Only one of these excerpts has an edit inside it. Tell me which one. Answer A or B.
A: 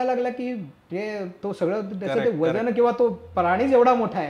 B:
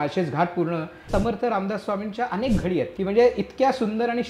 B